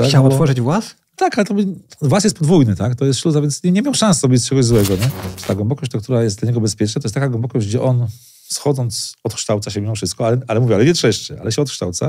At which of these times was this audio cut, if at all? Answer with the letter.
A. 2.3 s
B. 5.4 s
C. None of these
B